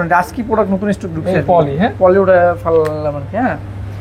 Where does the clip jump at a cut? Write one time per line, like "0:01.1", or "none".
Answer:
none